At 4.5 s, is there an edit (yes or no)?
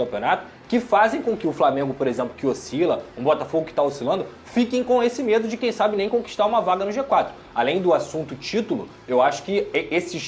no